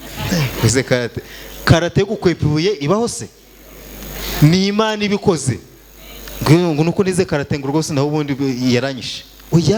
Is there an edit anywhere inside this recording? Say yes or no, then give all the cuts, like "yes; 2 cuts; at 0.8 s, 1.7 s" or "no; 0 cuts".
no; 0 cuts